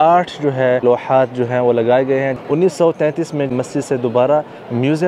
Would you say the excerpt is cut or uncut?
cut